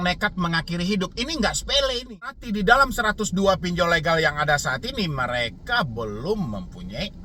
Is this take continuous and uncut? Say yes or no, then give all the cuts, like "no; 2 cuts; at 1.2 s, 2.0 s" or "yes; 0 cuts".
no; 1 cut; at 2.4 s